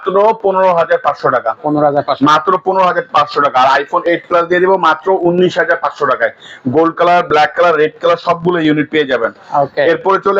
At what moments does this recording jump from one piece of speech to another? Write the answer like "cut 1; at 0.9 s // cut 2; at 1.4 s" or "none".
none